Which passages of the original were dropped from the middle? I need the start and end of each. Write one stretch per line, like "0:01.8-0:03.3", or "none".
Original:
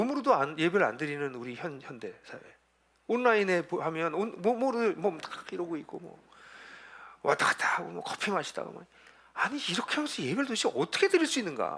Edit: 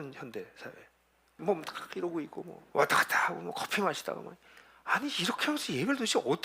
0:03.1-0:04.9
0:06.1-0:07.1